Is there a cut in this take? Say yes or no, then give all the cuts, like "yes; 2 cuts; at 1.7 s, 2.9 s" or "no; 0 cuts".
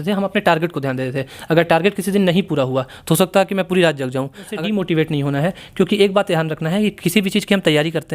yes; 1 cut; at 4.5 s